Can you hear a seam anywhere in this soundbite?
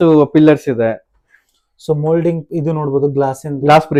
no; 0 cuts

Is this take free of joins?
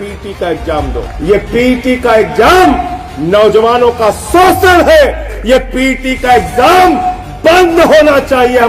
no; 2 cuts; at 1.1 s, 5.3 s

